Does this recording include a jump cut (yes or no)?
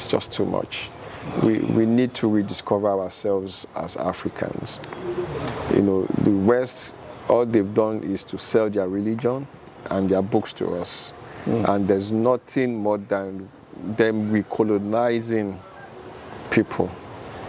no